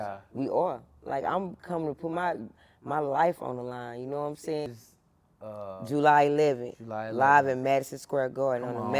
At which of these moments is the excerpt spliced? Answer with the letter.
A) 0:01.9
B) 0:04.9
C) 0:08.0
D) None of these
B